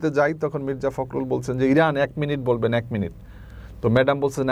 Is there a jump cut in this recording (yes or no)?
no